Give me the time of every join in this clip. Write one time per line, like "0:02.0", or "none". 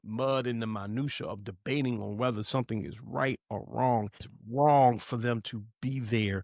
0:04.3